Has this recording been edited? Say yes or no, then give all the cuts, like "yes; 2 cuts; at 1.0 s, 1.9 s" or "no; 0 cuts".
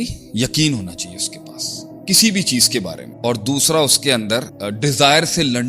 yes; 2 cuts; at 3.0 s, 4.6 s